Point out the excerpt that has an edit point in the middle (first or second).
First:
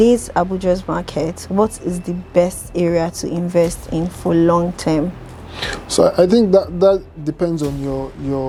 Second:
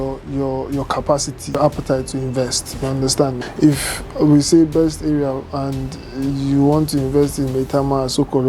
second